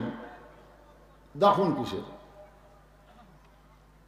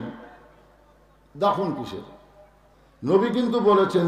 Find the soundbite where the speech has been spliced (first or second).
second